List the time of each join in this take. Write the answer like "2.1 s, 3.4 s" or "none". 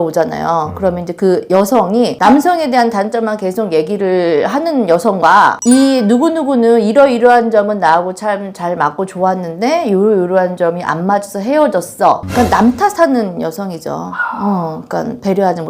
none